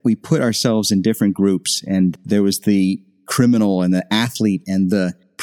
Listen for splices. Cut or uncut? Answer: uncut